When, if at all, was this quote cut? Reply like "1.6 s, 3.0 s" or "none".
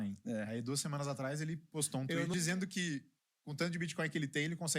2.3 s